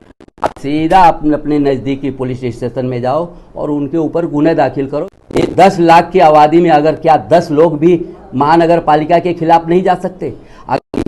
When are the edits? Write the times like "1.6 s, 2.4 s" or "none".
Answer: 5.0 s